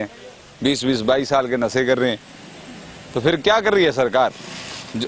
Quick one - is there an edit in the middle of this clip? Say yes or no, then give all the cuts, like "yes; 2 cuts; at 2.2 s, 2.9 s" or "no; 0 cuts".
no; 0 cuts